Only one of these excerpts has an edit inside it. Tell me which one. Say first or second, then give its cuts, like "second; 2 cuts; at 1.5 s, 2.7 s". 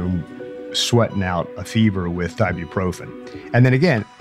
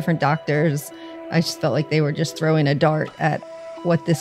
second; 1 cut; at 0.9 s